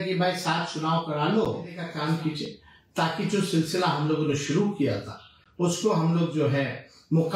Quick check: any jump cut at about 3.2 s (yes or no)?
no